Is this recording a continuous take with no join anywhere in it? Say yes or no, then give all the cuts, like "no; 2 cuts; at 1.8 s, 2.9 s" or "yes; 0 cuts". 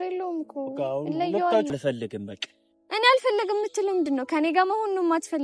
no; 1 cut; at 1.7 s